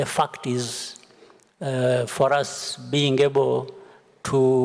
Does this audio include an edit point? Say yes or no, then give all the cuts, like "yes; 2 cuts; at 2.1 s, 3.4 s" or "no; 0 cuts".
no; 0 cuts